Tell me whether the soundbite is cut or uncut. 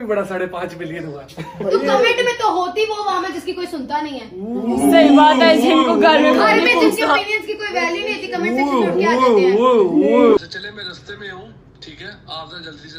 cut